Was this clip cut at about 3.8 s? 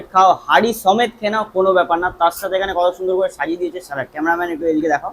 no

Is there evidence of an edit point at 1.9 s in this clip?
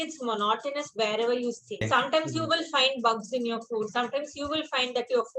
yes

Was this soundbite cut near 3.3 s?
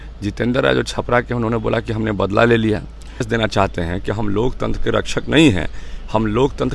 yes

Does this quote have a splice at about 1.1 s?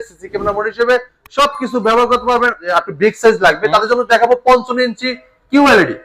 no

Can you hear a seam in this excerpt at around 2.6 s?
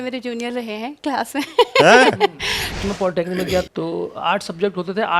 yes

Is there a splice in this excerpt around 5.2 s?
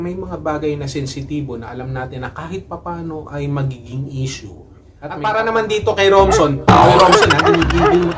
yes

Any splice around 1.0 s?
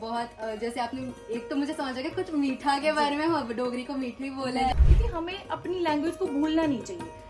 no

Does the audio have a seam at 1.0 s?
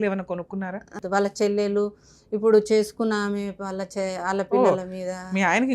yes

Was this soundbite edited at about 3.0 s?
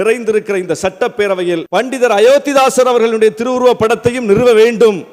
no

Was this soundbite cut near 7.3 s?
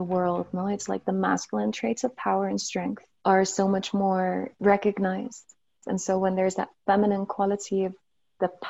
no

